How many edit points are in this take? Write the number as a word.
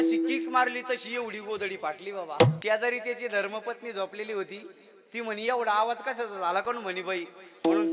one